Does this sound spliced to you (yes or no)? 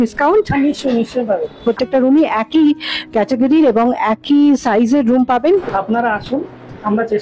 yes